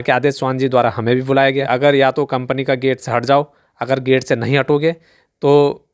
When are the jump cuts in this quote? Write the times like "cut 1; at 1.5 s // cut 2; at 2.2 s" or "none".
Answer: cut 1; at 1.7 s